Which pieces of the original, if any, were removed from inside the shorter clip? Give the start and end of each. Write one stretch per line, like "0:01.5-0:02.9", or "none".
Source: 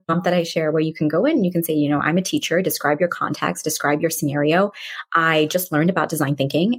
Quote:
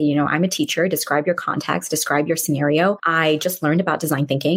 0:04.8-0:05.1